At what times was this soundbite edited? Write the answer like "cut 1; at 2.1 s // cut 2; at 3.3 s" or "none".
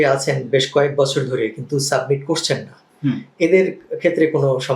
none